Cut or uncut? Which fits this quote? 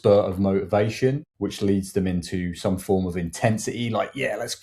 cut